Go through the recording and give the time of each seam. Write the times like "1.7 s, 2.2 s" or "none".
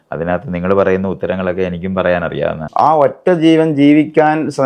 2.6 s